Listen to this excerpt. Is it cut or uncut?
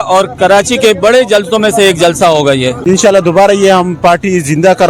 cut